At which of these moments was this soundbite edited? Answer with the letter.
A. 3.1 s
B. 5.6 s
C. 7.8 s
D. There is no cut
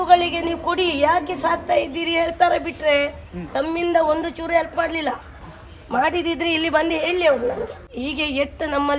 C